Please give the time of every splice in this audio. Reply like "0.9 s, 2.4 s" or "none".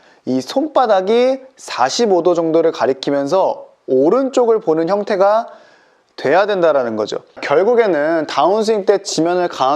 7.3 s